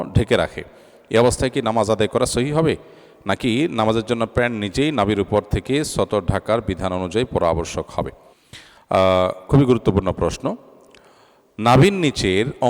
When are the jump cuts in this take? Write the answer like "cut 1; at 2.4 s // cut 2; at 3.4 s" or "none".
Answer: none